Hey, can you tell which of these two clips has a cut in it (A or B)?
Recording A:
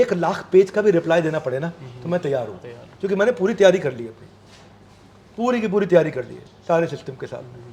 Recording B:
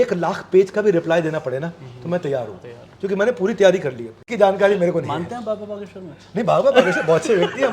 B